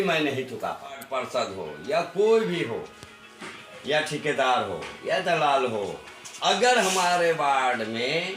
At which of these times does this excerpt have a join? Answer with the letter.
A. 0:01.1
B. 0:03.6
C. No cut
A